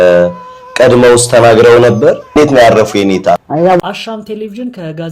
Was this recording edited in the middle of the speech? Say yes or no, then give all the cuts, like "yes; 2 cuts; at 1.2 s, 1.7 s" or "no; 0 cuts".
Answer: yes; 1 cut; at 3.8 s